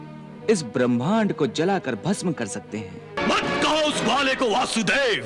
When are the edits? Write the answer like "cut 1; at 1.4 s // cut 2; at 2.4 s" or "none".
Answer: cut 1; at 3.2 s